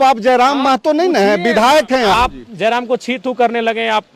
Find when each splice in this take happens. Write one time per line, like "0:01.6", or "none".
0:02.1